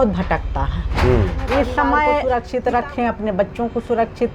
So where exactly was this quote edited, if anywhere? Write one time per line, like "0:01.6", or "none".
0:02.2